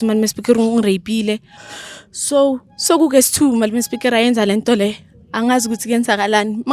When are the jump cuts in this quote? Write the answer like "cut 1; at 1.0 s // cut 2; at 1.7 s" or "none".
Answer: cut 1; at 1.5 s